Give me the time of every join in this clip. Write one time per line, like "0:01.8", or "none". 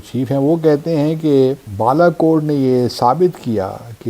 0:01.7